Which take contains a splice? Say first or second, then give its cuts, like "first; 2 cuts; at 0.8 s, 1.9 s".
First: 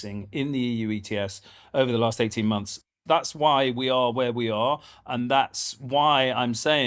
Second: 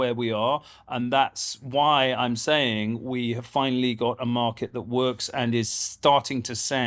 first; 1 cut; at 2.7 s